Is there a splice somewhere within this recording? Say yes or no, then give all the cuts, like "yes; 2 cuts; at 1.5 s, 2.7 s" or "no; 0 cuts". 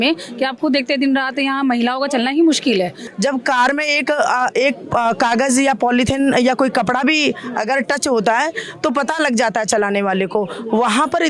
yes; 1 cut; at 3.0 s